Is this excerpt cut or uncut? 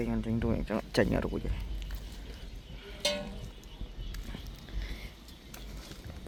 uncut